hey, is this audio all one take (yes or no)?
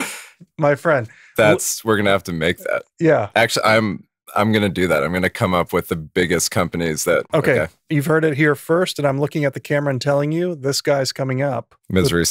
no